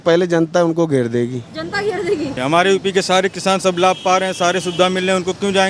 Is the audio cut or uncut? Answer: cut